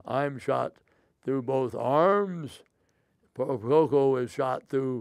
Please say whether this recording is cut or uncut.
uncut